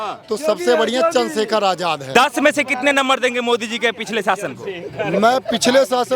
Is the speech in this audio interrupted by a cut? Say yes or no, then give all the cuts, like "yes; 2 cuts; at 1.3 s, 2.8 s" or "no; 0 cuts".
yes; 1 cut; at 2.0 s